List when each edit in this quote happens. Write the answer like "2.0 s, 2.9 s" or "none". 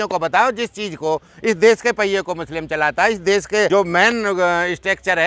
3.7 s